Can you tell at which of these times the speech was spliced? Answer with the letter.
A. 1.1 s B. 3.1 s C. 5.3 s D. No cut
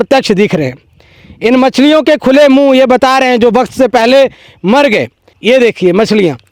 C